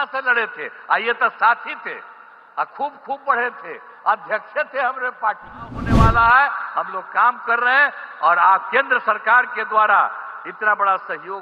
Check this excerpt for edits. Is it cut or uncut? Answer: cut